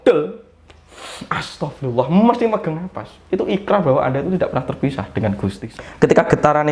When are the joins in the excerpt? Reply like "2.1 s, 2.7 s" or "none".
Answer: 5.6 s